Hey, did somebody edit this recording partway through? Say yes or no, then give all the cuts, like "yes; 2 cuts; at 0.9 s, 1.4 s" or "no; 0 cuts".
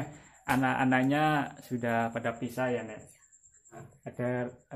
yes; 1 cut; at 3.7 s